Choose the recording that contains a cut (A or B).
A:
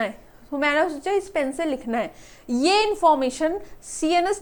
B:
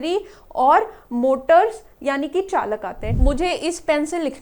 B